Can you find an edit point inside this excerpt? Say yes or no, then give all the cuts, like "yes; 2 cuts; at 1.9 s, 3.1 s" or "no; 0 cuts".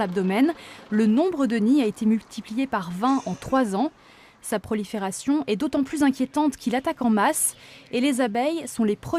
yes; 1 cut; at 3.1 s